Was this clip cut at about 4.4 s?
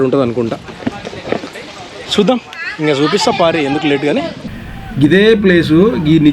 yes; 1 cut; at 4.4 s

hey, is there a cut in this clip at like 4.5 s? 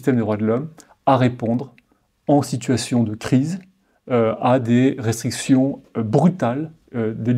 no; 0 cuts

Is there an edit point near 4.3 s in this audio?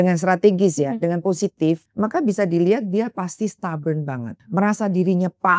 yes; 2 cuts; at 1.9 s, 4.3 s

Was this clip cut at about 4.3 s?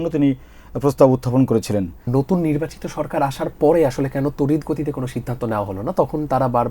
no; 1 cut; at 2.1 s

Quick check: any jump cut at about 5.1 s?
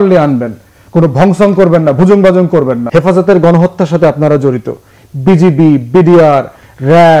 no; 1 cut; at 2.8 s

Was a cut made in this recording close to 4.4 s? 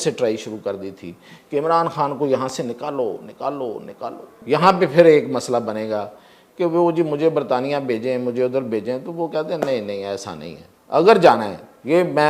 yes; 1 cut; at 4.4 s

